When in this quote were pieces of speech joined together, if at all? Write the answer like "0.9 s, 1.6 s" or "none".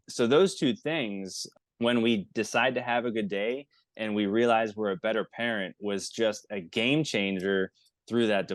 none